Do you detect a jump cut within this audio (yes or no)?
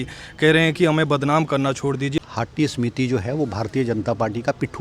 yes